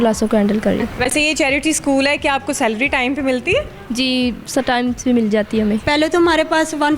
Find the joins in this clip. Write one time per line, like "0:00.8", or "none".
0:00.9
0:05.8

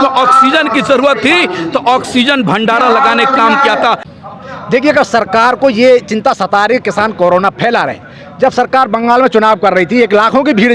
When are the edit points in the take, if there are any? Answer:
0:04.1

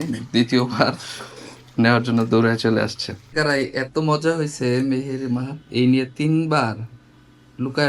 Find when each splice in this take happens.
none

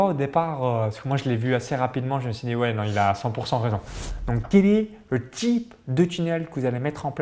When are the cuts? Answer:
0:04.0

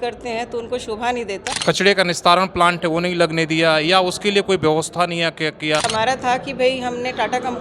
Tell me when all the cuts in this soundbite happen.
0:01.4
0:05.9

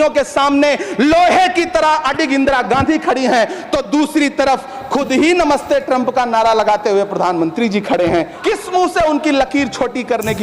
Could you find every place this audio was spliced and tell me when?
0:08.4

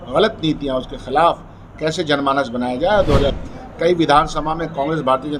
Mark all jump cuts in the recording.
0:03.4

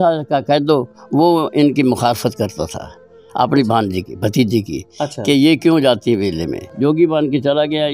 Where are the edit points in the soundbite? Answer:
0:06.7

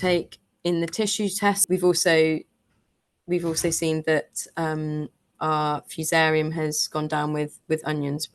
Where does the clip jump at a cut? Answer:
0:01.6

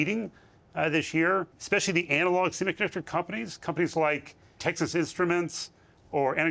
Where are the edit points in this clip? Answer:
0:01.6
0:04.6

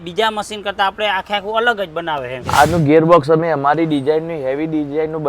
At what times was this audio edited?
0:02.4

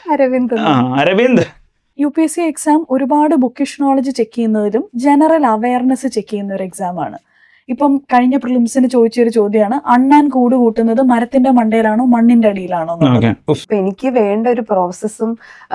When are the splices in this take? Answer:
0:01.8
0:13.6

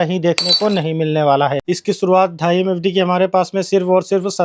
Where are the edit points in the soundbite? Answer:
0:01.7

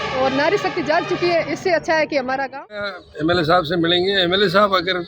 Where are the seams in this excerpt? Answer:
0:03.0

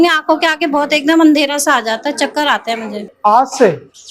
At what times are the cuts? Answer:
0:03.1

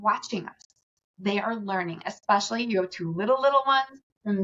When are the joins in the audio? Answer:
none

